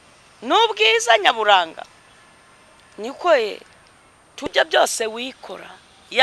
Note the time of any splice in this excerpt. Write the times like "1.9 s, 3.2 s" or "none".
4.5 s